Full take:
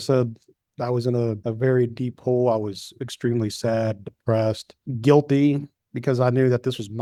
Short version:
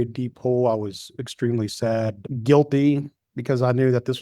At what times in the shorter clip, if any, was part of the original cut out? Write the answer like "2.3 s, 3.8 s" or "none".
2.3 s